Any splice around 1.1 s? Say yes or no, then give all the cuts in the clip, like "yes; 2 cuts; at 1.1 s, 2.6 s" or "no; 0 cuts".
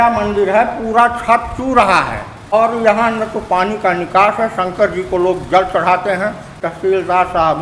no; 2 cuts; at 2.5 s, 6.5 s